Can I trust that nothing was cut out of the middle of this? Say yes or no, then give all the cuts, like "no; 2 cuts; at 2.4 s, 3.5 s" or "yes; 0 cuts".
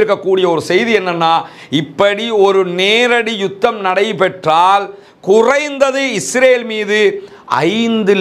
yes; 0 cuts